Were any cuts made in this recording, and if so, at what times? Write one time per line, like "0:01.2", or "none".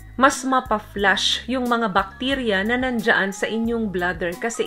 none